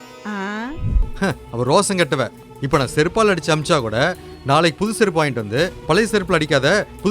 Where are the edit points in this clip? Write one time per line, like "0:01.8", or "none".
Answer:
0:01.1